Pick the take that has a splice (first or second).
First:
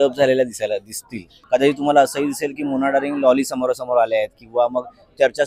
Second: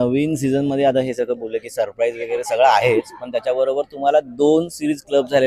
first